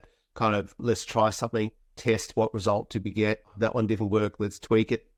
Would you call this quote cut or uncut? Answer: uncut